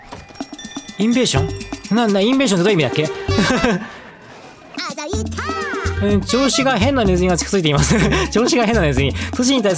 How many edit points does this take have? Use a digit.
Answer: 1